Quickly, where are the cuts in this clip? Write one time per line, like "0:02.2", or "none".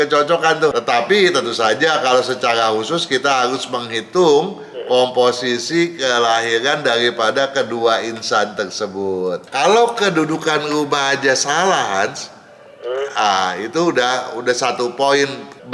0:00.7
0:09.4

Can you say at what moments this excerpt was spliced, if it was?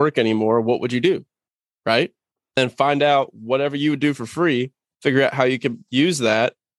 0:02.6

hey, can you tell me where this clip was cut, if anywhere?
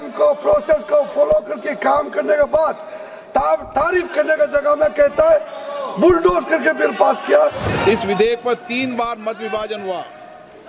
0:07.7

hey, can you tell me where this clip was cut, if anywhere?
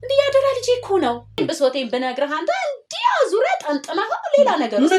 0:01.4

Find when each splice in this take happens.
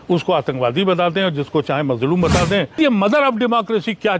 0:02.8

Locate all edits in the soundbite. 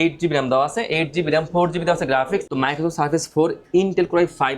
0:02.5

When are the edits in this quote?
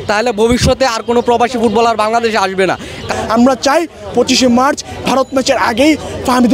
0:03.1

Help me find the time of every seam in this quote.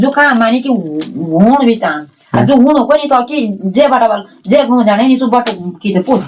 none

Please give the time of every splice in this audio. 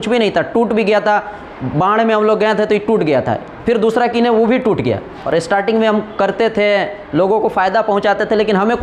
0:05.1

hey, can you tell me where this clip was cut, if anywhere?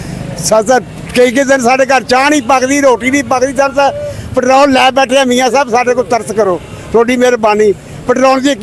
none

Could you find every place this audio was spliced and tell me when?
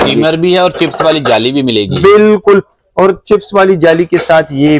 none

